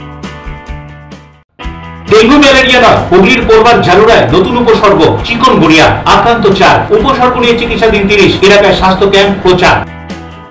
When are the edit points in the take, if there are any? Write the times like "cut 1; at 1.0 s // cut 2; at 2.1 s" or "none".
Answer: cut 1; at 1.4 s